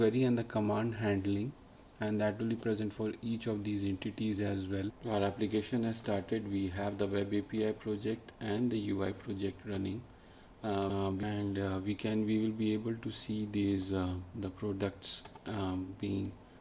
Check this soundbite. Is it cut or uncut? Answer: cut